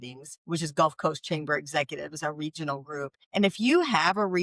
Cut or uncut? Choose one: cut